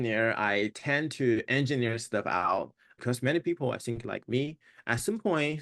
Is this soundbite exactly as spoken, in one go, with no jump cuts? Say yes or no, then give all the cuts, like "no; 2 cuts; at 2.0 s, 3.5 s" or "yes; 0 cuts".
no; 1 cut; at 2.9 s